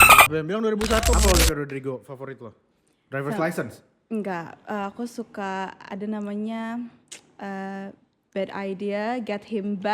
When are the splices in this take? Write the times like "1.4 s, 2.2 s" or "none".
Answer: 1.1 s